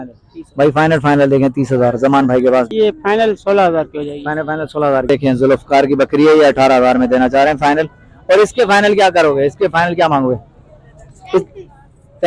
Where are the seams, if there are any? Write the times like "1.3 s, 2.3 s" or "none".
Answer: 2.7 s, 5.1 s